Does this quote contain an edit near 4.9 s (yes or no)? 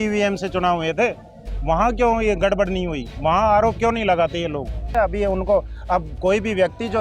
yes